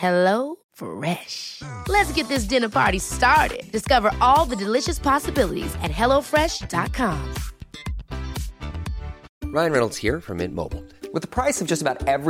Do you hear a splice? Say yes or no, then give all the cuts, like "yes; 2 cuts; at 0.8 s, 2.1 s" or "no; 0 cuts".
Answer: yes; 1 cut; at 9.2 s